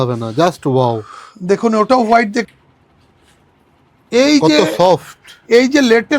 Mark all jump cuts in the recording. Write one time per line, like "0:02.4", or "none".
0:02.5